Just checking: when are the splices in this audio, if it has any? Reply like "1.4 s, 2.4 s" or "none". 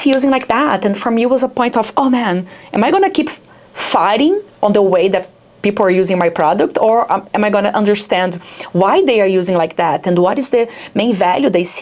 none